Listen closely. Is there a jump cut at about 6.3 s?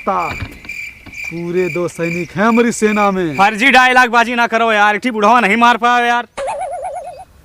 yes; 1 cut; at 6.3 s

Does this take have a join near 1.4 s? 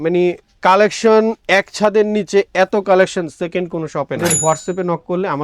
no; 1 cut; at 4.2 s

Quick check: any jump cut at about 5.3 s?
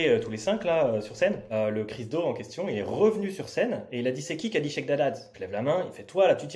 yes; 2 cuts; at 1.4 s, 5.3 s

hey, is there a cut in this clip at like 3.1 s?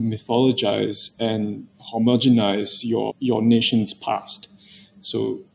yes; 1 cut; at 3.1 s

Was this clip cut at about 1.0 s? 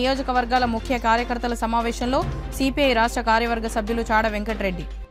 no; 0 cuts

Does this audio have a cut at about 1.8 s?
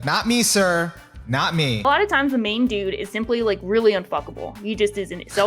yes; 1 cut; at 1.8 s

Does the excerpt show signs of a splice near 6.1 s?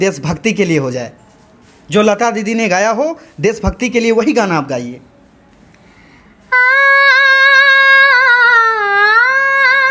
no; 0 cuts

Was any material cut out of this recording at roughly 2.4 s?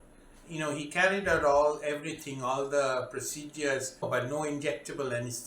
no; 1 cut; at 3.9 s

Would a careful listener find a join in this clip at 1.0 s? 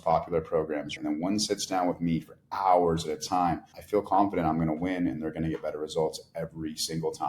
yes; 2 cuts; at 1.0 s, 3.7 s

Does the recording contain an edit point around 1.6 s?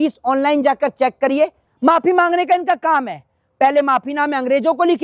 yes; 1 cut; at 1.6 s

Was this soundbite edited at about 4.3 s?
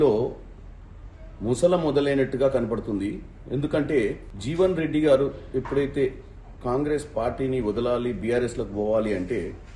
yes; 1 cut; at 4.3 s

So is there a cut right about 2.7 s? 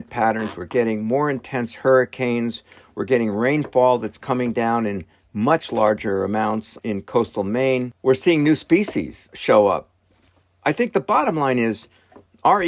no; 3 cuts; at 6.7 s, 7.9 s, 9.3 s

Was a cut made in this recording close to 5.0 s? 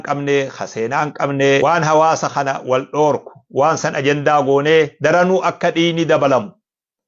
no; 1 cut; at 1.6 s

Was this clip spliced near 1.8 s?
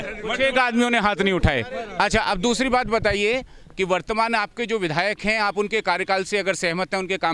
no; 0 cuts

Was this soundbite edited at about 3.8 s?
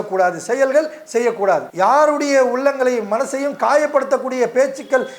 no; 1 cut; at 1.7 s

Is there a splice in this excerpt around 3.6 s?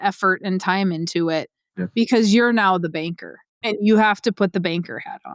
yes; 1 cut; at 3.6 s

